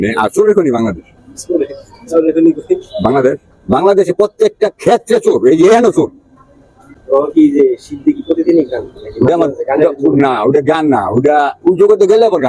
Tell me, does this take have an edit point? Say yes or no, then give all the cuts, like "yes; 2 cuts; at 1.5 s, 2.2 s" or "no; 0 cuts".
no; 0 cuts